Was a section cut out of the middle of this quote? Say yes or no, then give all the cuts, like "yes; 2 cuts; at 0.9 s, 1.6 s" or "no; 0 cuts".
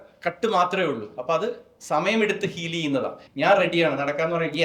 yes; 1 cut; at 3.2 s